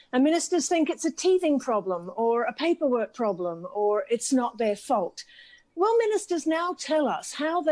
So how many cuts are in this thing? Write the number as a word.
zero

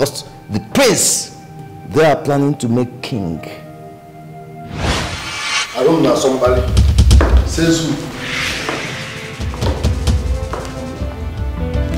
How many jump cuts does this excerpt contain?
one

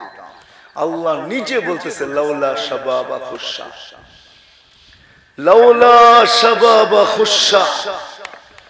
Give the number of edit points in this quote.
zero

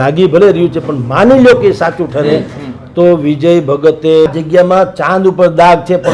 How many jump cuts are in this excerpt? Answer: one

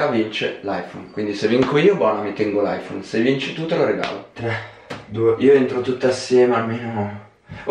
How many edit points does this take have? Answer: one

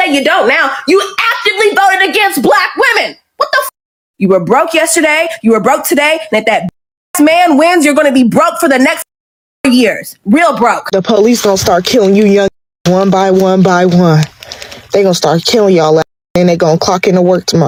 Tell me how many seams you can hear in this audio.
zero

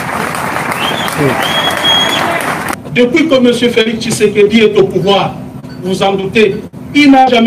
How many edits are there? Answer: one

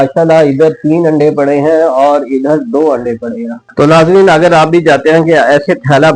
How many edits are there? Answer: one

